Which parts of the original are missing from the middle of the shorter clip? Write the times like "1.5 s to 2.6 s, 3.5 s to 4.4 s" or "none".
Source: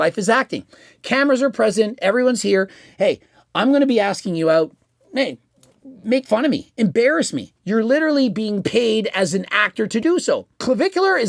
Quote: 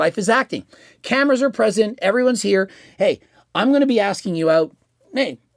none